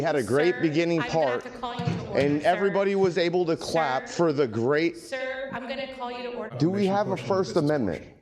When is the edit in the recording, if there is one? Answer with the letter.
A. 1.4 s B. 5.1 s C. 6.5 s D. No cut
C